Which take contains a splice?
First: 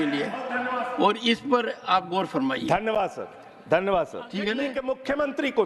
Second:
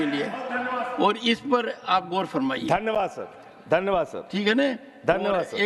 first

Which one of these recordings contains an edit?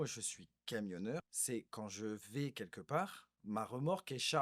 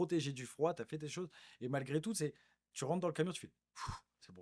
first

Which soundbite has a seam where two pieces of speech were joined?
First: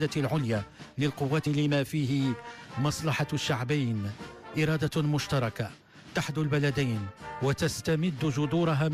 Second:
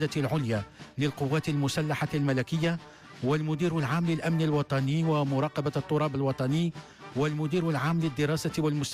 second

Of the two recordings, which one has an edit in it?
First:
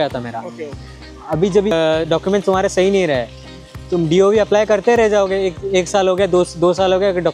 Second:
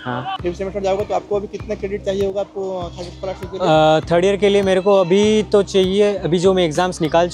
first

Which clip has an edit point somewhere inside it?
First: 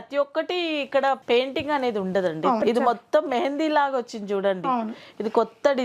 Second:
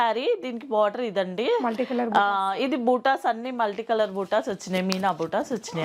first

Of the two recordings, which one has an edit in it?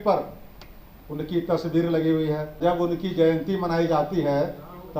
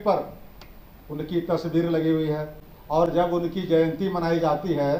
first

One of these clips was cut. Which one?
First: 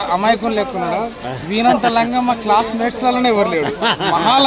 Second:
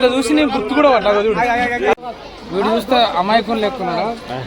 second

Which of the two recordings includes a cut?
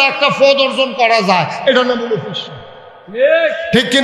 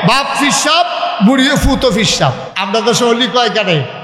second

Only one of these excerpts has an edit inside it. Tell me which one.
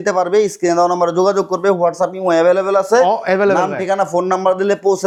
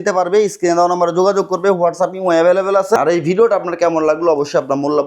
second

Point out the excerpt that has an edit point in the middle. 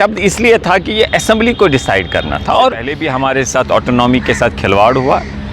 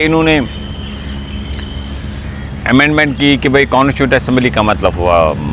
first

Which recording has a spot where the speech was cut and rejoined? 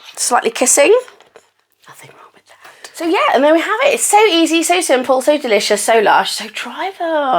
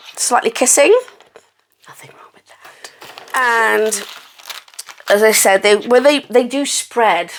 first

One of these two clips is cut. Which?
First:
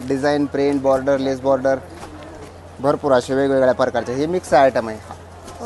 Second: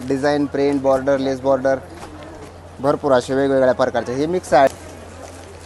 second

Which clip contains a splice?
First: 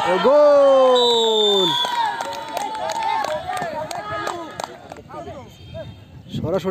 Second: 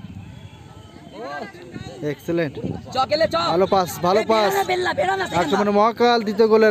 first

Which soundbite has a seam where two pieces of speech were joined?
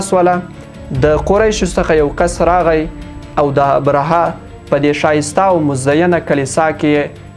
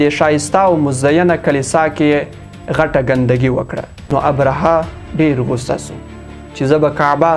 second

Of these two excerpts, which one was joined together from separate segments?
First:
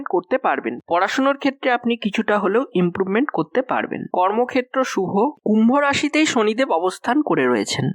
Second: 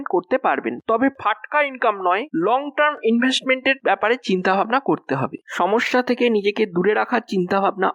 first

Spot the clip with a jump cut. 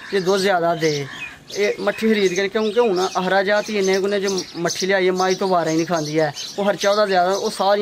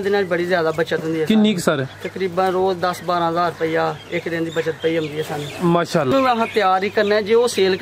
second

